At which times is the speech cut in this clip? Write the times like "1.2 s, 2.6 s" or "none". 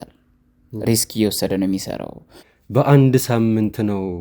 2.4 s